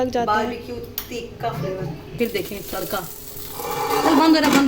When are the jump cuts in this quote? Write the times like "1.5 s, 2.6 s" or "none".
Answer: 2.1 s